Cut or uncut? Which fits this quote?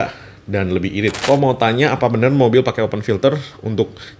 cut